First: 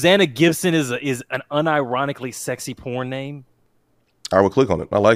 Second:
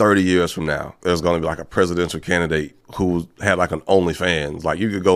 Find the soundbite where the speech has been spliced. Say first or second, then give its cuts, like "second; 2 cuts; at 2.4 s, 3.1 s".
second; 2 cuts; at 1.0 s, 2.8 s